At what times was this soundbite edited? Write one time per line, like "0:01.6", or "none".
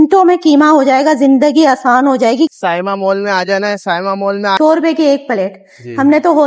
0:02.5
0:04.5